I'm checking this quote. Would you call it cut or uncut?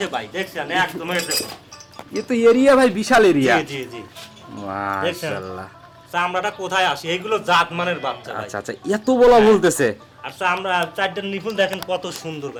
uncut